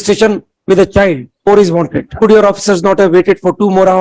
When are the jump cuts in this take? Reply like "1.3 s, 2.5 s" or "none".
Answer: 1.3 s, 2.1 s